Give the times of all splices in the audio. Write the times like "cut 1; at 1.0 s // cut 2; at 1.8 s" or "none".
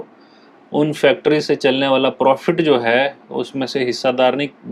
none